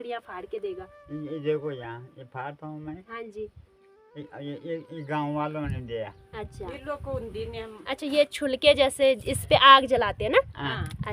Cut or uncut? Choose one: uncut